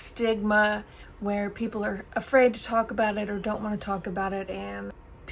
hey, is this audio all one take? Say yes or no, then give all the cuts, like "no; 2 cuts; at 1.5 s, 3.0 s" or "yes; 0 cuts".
yes; 0 cuts